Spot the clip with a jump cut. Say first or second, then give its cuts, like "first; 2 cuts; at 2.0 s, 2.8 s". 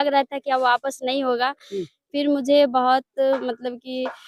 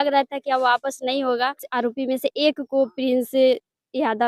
second; 1 cut; at 1.6 s